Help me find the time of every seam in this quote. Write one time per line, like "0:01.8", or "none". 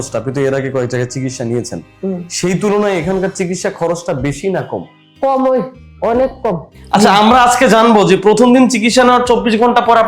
0:06.7